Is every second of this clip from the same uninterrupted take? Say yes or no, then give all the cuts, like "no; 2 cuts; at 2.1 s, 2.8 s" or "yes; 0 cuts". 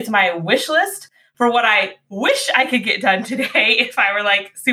yes; 0 cuts